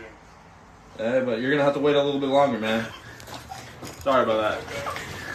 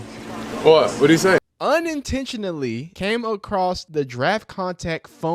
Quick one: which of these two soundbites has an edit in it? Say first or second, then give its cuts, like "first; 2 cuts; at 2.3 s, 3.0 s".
second; 3 cuts; at 1.5 s, 2.9 s, 3.8 s